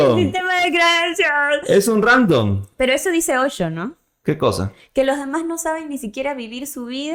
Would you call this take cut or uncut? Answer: uncut